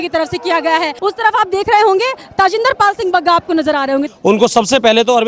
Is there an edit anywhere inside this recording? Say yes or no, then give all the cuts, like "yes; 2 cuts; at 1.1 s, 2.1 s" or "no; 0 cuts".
yes; 2 cuts; at 0.9 s, 4.1 s